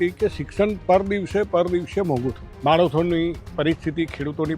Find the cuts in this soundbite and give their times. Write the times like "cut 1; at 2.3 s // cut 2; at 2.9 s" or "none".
cut 1; at 2.5 s